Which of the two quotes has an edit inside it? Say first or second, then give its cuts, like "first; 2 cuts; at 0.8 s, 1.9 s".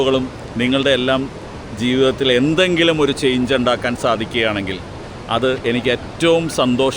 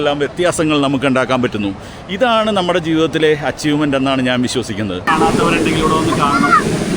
second; 1 cut; at 5.0 s